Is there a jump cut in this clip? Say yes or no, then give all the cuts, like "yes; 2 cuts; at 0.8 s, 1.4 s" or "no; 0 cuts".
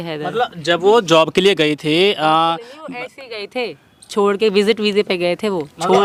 no; 0 cuts